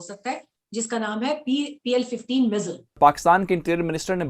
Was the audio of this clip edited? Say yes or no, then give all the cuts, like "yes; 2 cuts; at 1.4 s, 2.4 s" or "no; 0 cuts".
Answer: yes; 1 cut; at 3.0 s